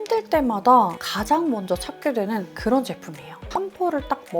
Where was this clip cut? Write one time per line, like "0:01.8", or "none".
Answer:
0:03.5